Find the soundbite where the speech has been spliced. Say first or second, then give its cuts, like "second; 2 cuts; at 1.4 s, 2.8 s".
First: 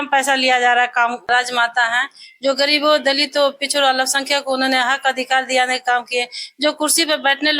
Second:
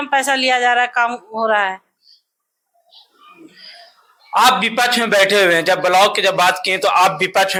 first; 1 cut; at 1.3 s